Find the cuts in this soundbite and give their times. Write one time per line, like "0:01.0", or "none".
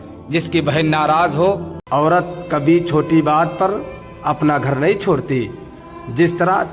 0:01.8